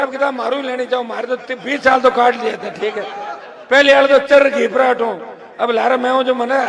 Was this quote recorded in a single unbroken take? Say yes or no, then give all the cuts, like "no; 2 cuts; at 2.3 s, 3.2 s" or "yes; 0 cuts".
yes; 0 cuts